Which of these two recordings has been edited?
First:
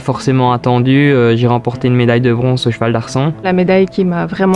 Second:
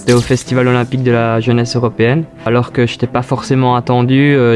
first; 1 cut; at 3.4 s

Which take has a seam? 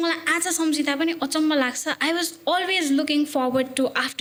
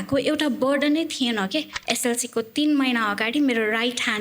second; 1 cut; at 1.8 s

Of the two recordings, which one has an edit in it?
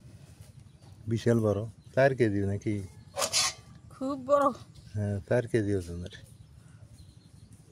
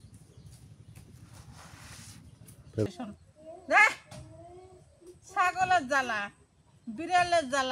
second; 1 cut; at 2.9 s

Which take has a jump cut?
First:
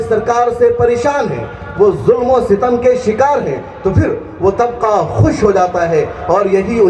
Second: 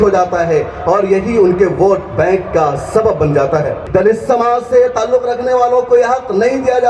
second; 1 cut; at 3.8 s

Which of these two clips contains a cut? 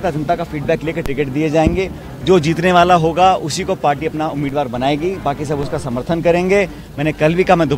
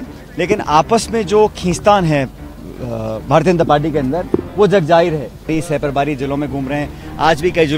second; 1 cut; at 5.5 s

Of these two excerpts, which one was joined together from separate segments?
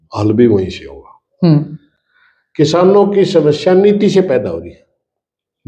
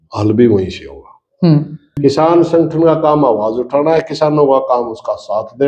second; 1 cut; at 2.0 s

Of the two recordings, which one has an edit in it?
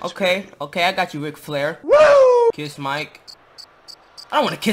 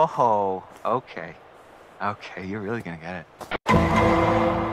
first; 1 cut; at 2.5 s

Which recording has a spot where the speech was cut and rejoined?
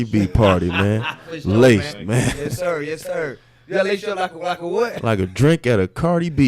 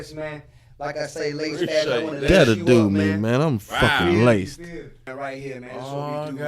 second; 1 cut; at 5.1 s

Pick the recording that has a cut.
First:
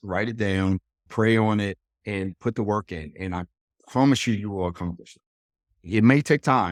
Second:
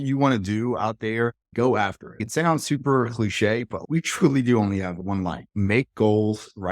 second; 1 cut; at 5.4 s

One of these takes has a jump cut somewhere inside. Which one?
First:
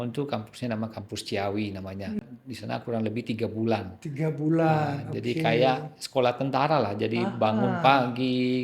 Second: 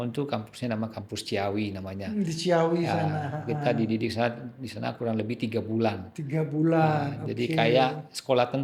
first; 1 cut; at 2.2 s

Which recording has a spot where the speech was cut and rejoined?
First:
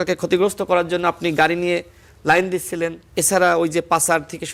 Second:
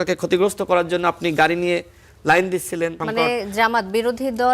second; 1 cut; at 3.0 s

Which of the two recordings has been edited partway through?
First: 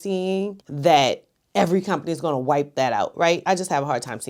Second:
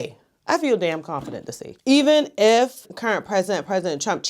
second; 1 cut; at 1.7 s

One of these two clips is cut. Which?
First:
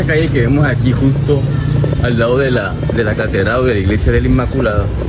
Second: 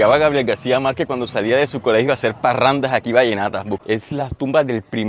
second; 1 cut; at 3.6 s

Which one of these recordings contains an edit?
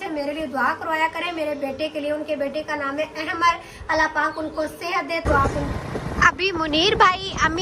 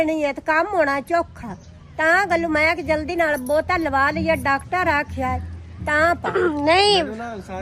first; 1 cut; at 5.6 s

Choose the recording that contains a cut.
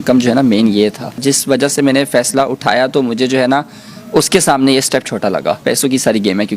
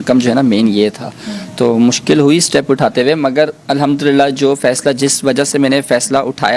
first; 2 cuts; at 1.6 s, 5.6 s

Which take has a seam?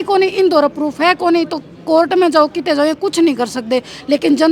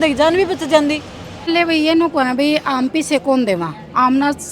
second; 1 cut; at 1.5 s

